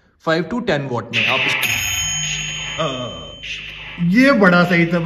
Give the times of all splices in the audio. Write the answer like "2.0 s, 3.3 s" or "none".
1.5 s